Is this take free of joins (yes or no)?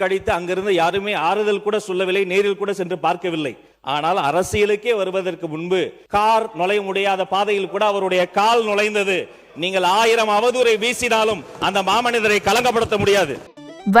no